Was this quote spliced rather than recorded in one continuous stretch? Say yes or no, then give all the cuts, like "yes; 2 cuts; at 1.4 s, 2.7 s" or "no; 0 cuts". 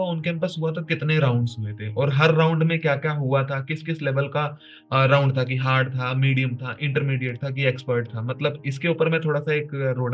no; 0 cuts